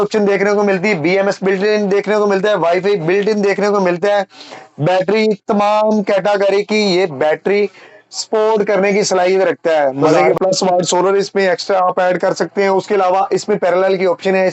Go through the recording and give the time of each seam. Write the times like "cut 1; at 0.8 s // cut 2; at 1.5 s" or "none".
cut 1; at 10.0 s